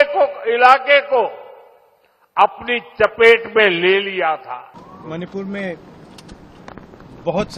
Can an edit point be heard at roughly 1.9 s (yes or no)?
no